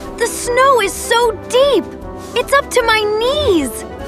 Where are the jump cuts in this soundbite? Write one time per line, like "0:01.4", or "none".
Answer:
none